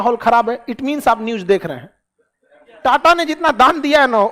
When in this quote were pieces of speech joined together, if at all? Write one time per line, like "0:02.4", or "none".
0:02.7